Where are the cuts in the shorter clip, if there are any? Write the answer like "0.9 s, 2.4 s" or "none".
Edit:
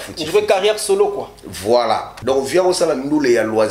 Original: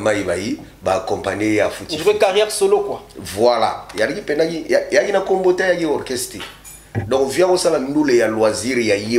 2.1 s